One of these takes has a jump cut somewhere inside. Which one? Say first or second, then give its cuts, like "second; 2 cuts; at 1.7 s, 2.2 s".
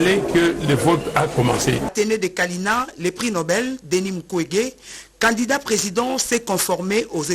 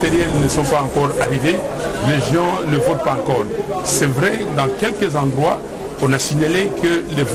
first; 1 cut; at 1.9 s